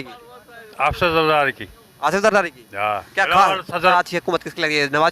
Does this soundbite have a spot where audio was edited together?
yes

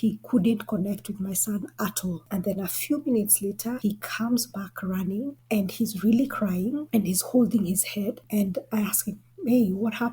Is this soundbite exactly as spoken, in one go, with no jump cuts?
no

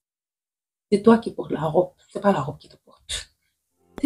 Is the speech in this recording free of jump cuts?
yes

